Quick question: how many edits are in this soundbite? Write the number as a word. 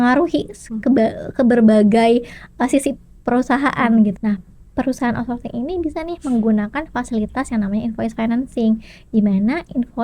one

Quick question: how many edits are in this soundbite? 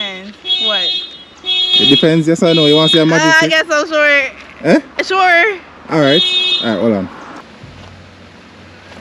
zero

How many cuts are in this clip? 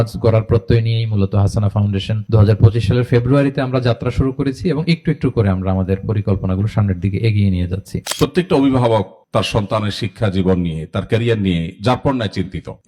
two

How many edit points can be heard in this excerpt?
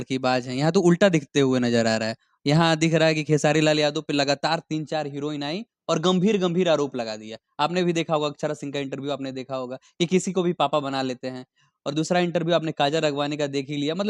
zero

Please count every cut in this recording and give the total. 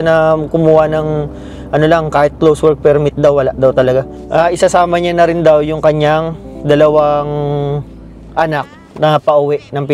one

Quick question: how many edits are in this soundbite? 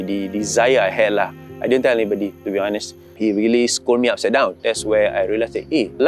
two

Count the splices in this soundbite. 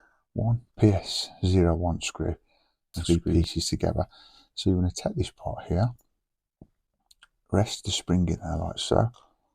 one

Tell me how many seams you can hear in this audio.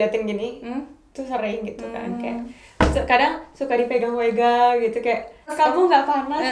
one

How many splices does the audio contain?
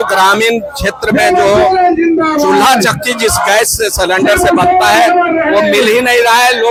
zero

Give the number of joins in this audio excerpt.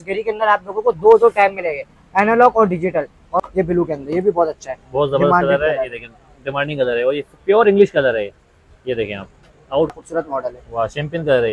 two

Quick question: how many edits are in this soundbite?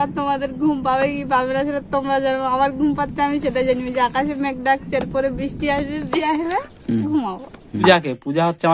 two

